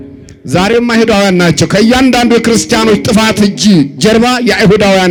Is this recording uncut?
yes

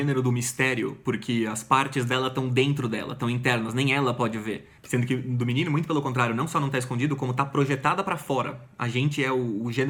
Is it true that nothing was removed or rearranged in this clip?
yes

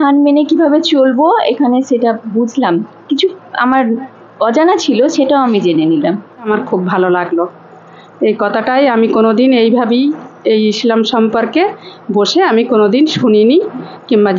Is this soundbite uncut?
no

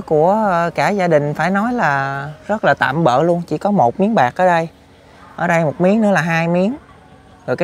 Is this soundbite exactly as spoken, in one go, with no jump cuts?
yes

